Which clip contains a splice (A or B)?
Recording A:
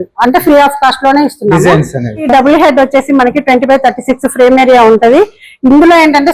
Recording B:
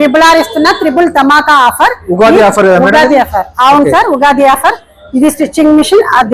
A